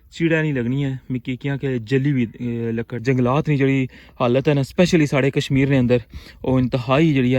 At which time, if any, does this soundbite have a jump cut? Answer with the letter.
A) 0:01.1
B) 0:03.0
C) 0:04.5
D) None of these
B